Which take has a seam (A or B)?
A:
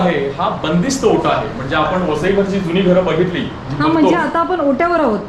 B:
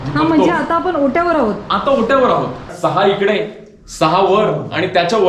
B